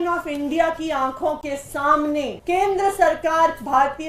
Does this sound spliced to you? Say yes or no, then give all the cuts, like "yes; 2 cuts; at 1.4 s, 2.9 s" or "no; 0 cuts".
yes; 1 cut; at 2.4 s